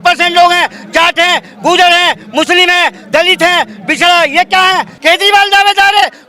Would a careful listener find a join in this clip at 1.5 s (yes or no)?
no